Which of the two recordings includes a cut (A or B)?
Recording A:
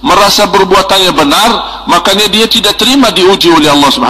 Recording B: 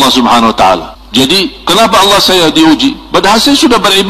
B